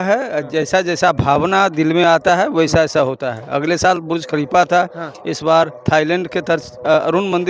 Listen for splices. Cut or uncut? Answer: uncut